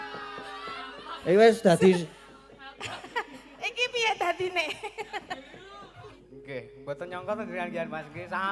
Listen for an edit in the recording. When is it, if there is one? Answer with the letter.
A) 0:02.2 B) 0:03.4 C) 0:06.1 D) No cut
C